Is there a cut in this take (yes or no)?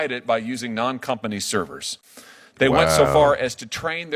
no